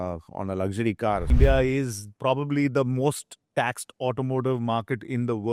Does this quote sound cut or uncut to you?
cut